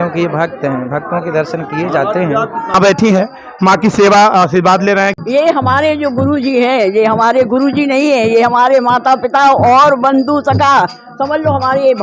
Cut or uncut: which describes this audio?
cut